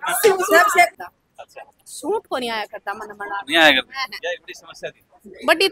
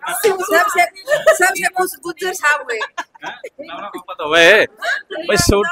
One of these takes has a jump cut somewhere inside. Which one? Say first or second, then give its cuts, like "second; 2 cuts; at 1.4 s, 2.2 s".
first; 1 cut; at 1.0 s